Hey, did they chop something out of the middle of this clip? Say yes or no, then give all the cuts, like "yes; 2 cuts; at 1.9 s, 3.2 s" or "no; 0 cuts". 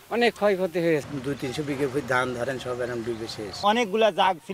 yes; 2 cuts; at 1.0 s, 3.6 s